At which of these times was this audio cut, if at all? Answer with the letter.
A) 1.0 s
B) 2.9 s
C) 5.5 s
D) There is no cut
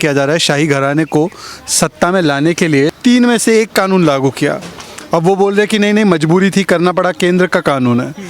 B